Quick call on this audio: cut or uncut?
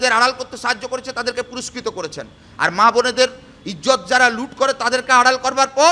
uncut